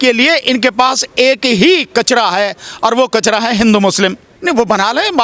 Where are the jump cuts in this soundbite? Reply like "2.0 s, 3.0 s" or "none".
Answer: 4.3 s